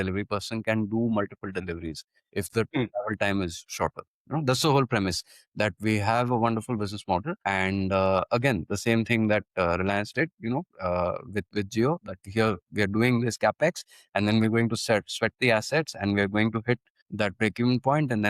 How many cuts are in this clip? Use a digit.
2